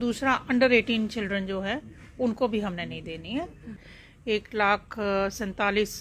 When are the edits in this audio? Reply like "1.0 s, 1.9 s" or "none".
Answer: 3.8 s